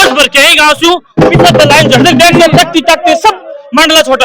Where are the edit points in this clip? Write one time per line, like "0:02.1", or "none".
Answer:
none